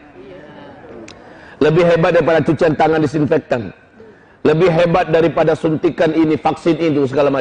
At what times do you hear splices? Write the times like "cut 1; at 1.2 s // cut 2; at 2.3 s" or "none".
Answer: none